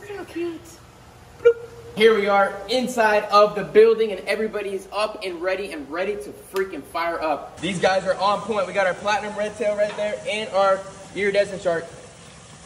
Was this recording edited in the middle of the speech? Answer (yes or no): yes